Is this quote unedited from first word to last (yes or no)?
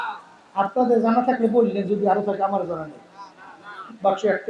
yes